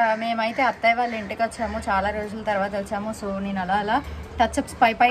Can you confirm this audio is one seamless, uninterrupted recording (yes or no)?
yes